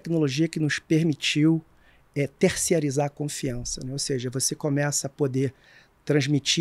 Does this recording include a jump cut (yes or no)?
no